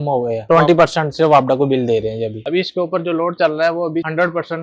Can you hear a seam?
yes; 1 cut; at 2.4 s

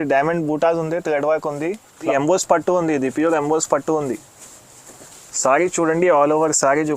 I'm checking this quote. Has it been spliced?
yes; 1 cut; at 2.1 s

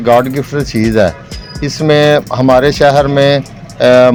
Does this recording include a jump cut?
no; 0 cuts

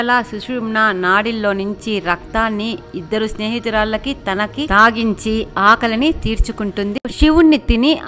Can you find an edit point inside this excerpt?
yes; 1 cut; at 7.1 s

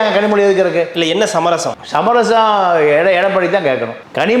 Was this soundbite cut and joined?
no; 0 cuts

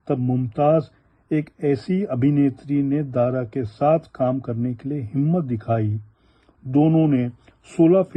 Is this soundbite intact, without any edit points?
yes; 0 cuts

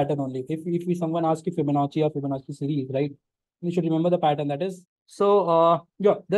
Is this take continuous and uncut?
no; 1 cut; at 4.8 s

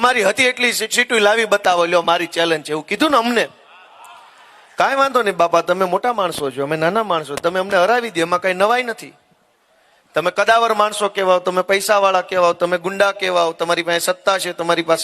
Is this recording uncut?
yes; 0 cuts

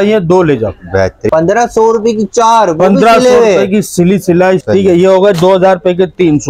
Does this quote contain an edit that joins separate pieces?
yes; 2 cuts; at 1.2 s, 4.6 s

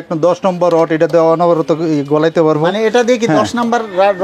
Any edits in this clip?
no; 0 cuts

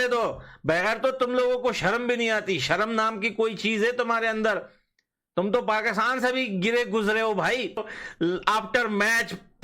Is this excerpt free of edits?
no; 1 cut; at 8.0 s

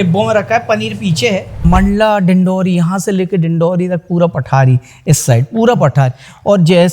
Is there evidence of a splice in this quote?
yes; 1 cut; at 1.7 s

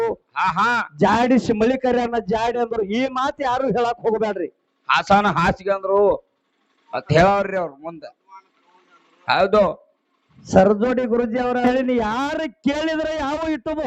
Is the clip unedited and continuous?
no; 1 cut; at 11.6 s

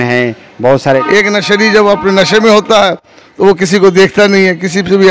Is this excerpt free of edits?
no; 1 cut; at 1.0 s

